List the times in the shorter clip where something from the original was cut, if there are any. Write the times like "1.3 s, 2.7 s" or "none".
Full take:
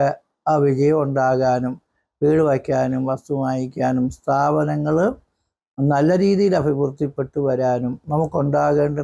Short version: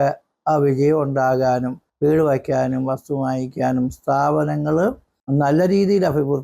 1.8 s, 5.1 s